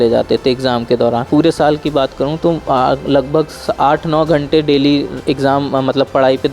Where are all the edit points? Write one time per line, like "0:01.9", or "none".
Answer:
0:01.3